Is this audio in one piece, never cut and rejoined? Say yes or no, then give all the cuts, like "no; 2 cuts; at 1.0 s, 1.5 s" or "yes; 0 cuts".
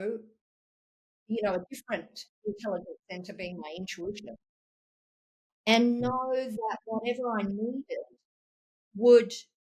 no; 1 cut; at 1.1 s